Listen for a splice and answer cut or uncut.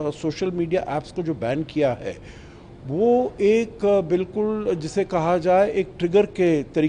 uncut